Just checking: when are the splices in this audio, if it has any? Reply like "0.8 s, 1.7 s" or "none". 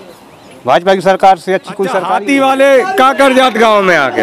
2.0 s